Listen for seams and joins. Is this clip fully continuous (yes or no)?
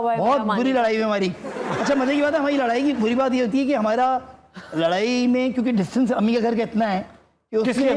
yes